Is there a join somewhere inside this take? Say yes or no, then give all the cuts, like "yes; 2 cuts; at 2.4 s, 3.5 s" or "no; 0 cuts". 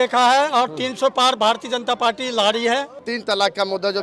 yes; 1 cut; at 3.1 s